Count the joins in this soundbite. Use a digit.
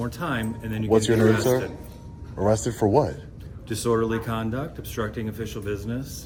0